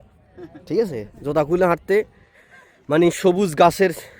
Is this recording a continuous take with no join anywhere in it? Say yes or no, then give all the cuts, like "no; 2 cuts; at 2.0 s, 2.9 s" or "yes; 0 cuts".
yes; 0 cuts